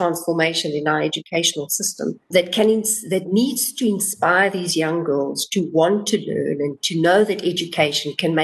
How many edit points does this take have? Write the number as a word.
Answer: one